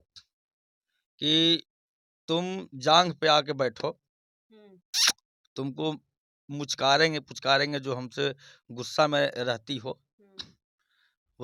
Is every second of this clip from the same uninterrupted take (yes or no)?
yes